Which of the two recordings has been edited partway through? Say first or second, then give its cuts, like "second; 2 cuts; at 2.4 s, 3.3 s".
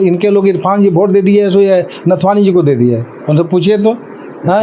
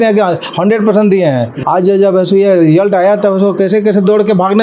second; 1 cut; at 1.6 s